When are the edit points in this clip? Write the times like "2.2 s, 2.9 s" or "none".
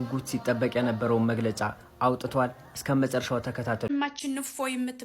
3.9 s